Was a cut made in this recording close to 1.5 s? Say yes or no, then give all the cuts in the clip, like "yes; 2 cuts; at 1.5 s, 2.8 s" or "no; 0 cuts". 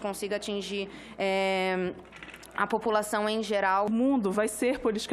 no; 1 cut; at 3.9 s